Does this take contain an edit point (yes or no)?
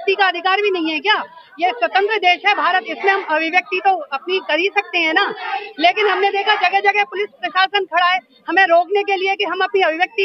no